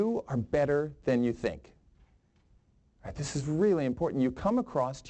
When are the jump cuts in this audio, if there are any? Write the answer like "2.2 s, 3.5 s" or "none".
none